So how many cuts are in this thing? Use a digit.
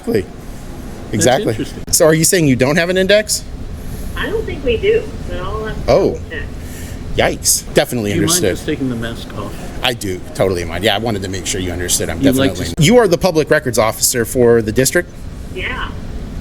3